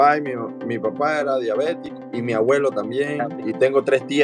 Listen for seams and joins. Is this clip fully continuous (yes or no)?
no